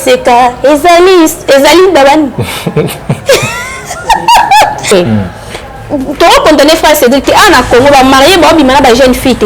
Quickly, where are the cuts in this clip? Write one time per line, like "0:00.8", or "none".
0:04.8